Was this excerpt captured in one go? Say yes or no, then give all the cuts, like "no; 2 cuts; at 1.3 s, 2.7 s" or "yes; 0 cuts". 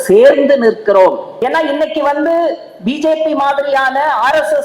no; 1 cut; at 1.3 s